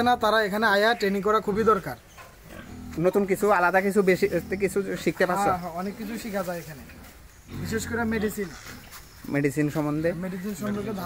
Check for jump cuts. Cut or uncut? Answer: uncut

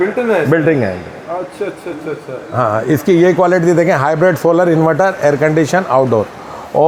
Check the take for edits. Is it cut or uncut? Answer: uncut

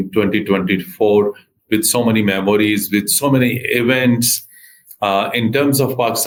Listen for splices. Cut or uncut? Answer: uncut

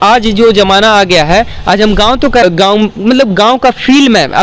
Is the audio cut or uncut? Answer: cut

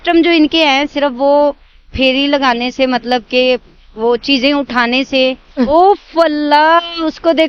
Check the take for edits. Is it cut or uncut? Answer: cut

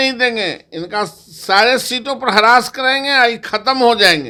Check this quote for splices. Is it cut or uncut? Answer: uncut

